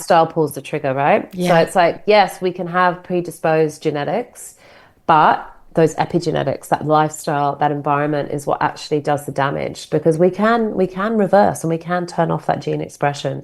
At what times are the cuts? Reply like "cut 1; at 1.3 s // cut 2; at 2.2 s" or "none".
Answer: none